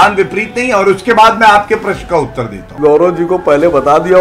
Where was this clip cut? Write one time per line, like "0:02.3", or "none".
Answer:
0:02.6